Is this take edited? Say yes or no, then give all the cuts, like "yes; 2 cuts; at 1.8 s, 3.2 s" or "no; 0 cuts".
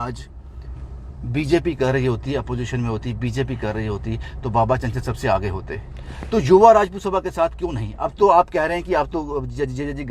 no; 0 cuts